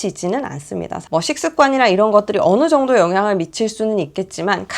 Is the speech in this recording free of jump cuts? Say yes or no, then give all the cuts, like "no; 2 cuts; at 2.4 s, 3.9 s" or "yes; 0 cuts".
no; 1 cut; at 1.1 s